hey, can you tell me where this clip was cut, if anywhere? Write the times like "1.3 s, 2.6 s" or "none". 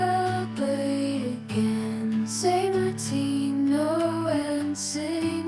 none